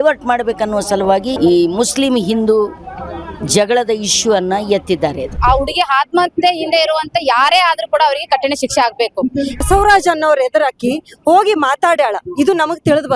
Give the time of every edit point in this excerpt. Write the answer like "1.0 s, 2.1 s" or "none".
5.3 s, 9.5 s